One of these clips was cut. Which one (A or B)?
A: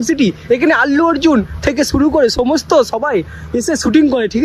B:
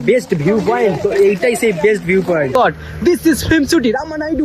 B